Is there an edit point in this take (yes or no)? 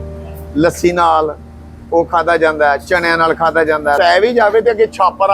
yes